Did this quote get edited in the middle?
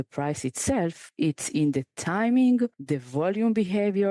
yes; 2 cuts; at 1.0 s, 2.8 s

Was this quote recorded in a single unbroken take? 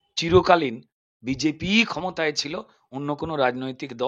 yes; 0 cuts

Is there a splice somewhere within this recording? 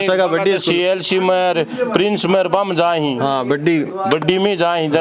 no; 0 cuts

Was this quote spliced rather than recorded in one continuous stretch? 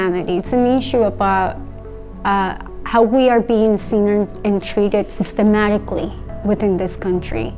no; 0 cuts

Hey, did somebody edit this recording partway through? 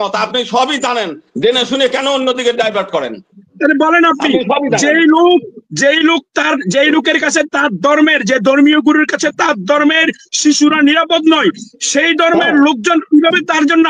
no; 0 cuts

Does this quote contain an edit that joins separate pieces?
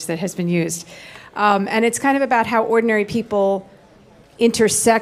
no; 0 cuts

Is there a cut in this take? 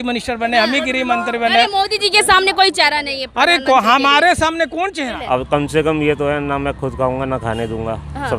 yes; 1 cut; at 5.1 s

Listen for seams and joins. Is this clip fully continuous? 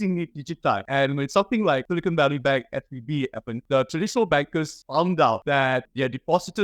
no; 5 cuts; at 0.8 s, 1.9 s, 3.6 s, 4.8 s, 5.8 s

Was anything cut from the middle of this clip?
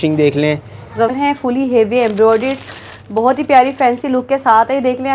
yes; 1 cut; at 1.1 s

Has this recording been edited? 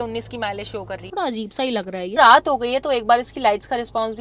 yes; 2 cuts; at 1.1 s, 2.2 s

